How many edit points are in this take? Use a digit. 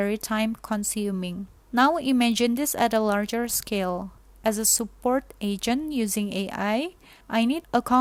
0